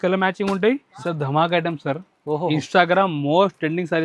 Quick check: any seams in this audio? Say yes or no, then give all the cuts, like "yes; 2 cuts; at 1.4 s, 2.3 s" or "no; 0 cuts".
yes; 1 cut; at 0.9 s